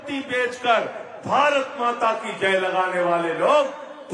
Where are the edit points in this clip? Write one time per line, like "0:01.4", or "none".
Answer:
none